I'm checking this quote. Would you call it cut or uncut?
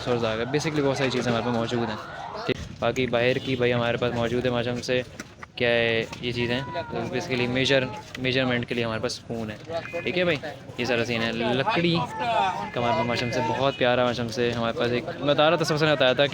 cut